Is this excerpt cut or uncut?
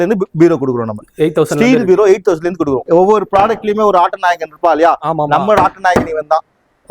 cut